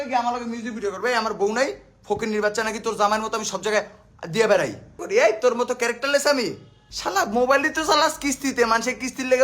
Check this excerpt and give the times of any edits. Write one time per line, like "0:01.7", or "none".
0:05.0
0:06.7